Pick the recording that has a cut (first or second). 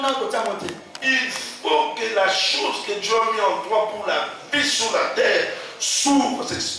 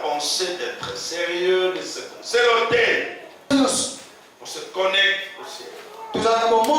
second